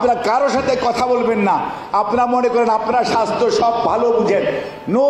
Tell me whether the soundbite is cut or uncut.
uncut